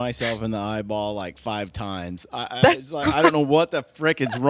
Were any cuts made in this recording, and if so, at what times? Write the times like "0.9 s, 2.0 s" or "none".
none